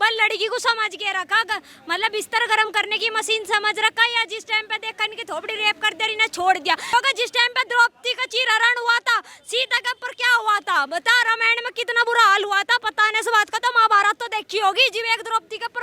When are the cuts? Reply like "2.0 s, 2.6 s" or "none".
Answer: none

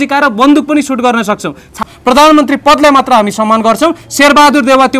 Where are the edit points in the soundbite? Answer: 1.8 s

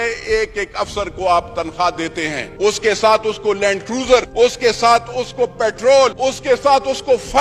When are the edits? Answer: 2.4 s, 4.3 s, 6.2 s

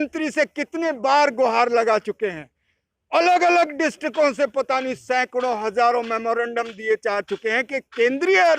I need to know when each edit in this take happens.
none

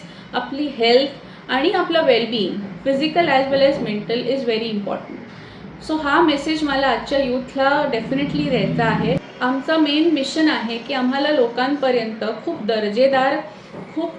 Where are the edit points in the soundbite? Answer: 9.2 s

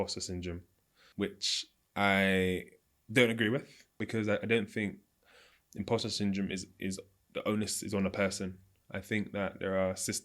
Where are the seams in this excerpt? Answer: 1.0 s, 4.0 s

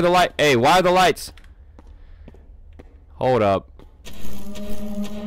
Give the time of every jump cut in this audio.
none

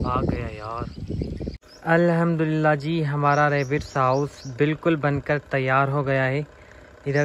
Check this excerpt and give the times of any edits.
1.6 s

